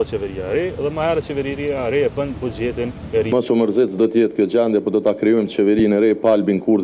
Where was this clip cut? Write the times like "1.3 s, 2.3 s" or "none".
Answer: 3.3 s